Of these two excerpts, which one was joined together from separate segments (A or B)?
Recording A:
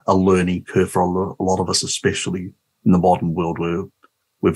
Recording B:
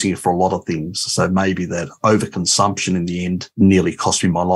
B